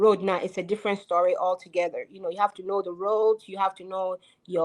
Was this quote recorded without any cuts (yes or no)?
yes